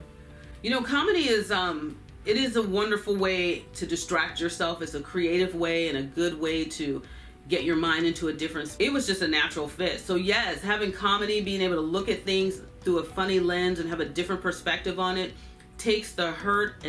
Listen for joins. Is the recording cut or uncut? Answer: cut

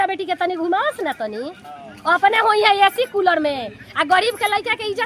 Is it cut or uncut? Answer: uncut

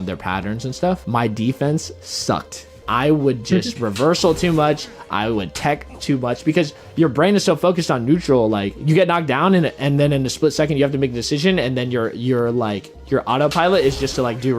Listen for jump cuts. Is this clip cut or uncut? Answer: cut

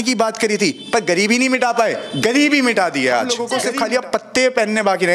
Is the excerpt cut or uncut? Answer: cut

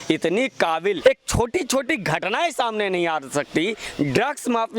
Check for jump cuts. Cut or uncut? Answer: cut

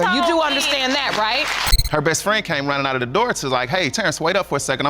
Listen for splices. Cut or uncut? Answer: cut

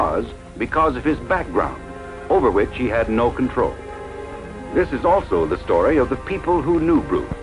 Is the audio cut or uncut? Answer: cut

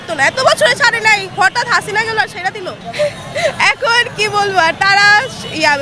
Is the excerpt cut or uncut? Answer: cut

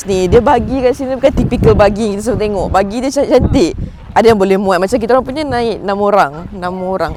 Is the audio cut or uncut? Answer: uncut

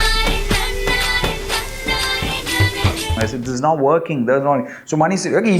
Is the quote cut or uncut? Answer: cut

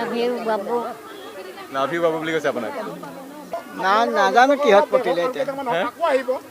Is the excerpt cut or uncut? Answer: cut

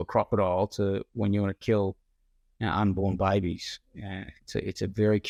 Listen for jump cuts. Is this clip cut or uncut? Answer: uncut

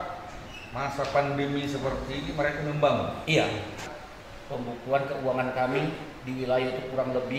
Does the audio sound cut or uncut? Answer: cut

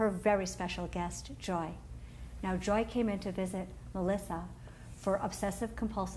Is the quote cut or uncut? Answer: cut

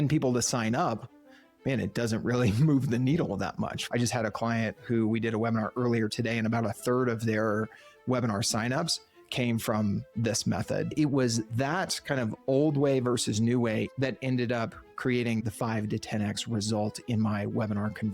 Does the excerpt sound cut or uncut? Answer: cut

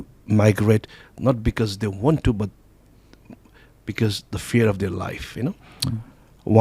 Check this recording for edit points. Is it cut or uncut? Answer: uncut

